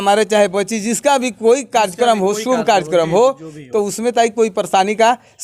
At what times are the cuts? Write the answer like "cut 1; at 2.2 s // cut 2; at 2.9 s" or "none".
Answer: none